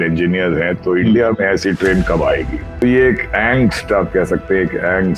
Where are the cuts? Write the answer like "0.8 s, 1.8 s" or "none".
2.8 s

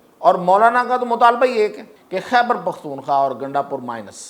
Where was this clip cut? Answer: 1.9 s

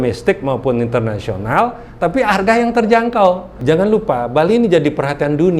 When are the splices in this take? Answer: 3.6 s

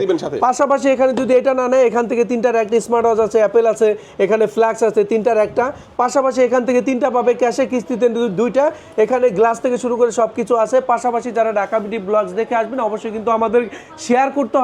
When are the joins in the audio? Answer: none

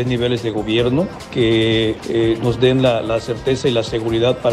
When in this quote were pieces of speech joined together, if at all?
1.2 s, 2.0 s

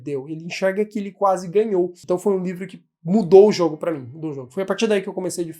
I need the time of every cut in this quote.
2.0 s

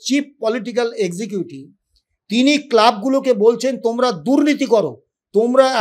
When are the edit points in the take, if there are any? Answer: none

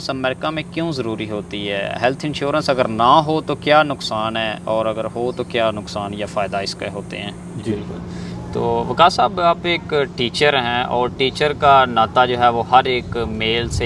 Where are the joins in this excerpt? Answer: 7.7 s

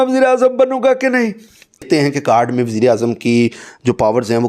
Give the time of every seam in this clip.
1.8 s

